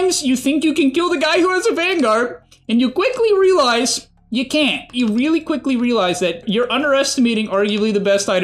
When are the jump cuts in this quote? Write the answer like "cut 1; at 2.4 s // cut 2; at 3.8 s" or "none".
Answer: cut 1; at 4.9 s // cut 2; at 6.4 s